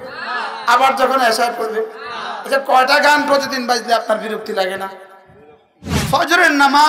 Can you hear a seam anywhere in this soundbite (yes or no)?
yes